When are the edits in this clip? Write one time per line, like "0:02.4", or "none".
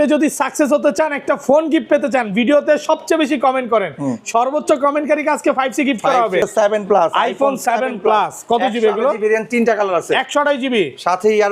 0:06.5